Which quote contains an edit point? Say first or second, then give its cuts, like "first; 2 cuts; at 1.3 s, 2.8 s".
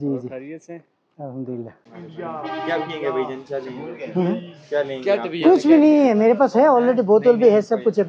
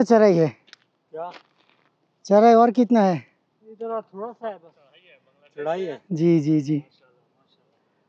first; 1 cut; at 1.9 s